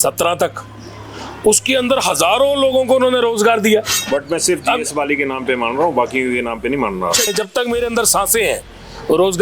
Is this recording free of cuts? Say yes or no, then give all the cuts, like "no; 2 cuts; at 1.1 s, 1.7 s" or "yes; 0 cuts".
no; 2 cuts; at 4.0 s, 7.3 s